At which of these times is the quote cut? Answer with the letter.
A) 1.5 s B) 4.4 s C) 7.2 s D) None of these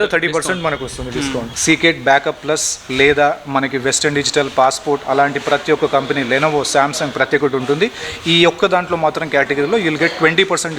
A